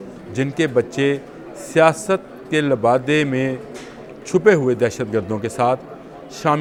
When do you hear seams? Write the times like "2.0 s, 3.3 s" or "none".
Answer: none